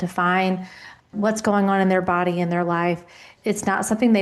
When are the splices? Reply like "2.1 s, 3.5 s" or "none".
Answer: 1.1 s, 3.3 s